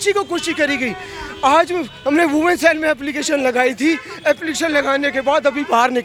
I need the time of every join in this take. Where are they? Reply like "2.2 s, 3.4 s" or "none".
none